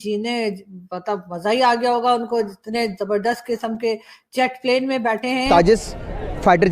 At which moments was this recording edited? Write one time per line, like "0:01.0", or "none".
0:05.4